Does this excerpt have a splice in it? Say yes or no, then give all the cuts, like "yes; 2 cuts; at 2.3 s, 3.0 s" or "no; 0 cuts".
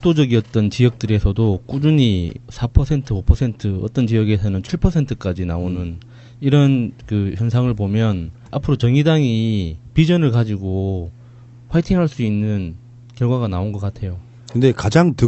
yes; 1 cut; at 2.3 s